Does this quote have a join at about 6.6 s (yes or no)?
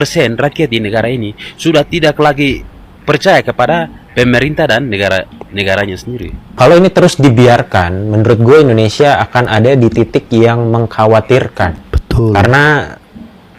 yes